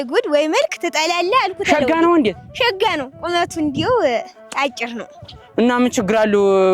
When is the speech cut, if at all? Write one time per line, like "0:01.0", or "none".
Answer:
none